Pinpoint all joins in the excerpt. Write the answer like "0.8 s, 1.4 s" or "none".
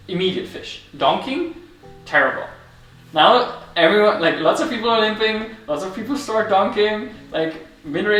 none